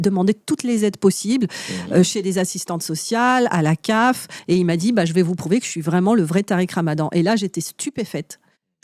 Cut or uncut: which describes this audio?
cut